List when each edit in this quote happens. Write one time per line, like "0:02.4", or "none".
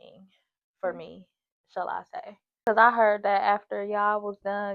0:02.7